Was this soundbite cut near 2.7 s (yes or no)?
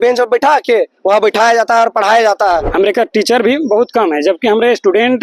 yes